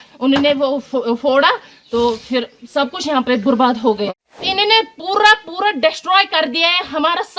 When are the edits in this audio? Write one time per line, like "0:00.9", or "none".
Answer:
0:04.1

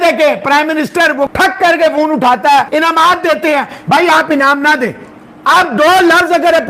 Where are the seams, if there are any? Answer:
0:01.3
0:02.7

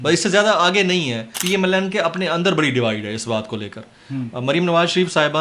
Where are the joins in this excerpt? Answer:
0:01.3

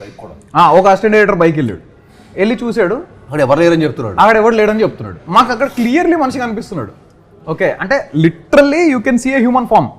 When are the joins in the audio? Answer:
none

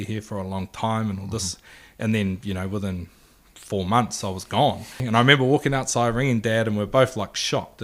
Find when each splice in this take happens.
0:05.0

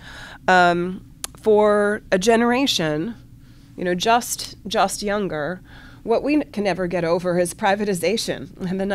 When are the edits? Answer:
none

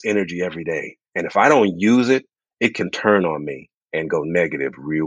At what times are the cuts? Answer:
none

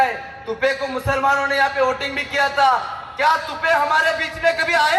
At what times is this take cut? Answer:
none

